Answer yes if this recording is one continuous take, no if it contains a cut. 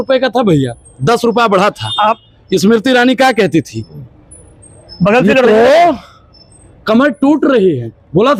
yes